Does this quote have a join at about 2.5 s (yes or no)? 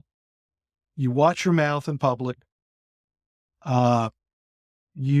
no